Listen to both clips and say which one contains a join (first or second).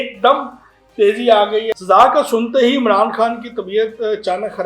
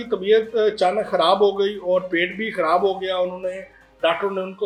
first